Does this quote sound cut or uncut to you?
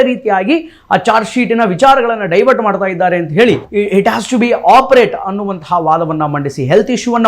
cut